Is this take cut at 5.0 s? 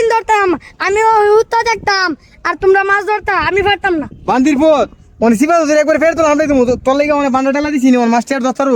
no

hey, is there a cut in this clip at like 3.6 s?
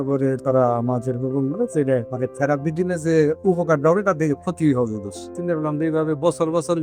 no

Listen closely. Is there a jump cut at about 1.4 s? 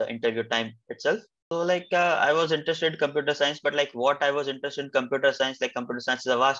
yes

